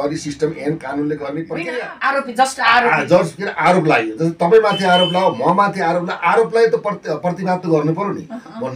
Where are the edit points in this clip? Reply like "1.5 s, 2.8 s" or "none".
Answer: 1.6 s